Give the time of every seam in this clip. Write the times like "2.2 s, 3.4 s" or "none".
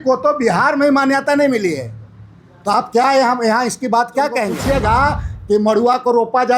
4.6 s